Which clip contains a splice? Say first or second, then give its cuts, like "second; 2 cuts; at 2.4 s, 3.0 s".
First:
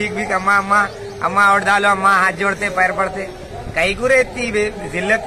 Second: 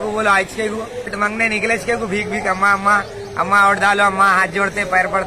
second; 1 cut; at 1.1 s